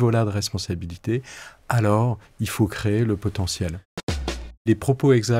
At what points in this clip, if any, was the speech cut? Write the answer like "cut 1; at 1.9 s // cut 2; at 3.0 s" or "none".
cut 1; at 4.1 s